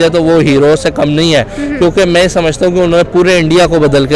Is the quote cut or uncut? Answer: uncut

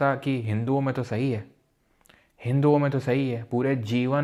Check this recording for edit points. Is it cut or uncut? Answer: uncut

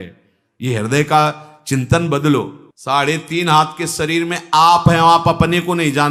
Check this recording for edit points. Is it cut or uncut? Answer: cut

